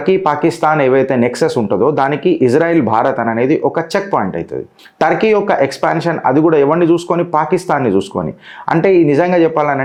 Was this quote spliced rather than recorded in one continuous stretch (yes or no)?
no